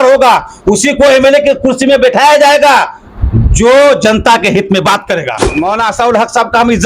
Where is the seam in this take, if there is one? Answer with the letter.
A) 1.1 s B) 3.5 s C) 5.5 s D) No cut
C